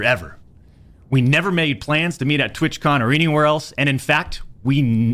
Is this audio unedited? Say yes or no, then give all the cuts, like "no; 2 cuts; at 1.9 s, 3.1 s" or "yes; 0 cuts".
yes; 0 cuts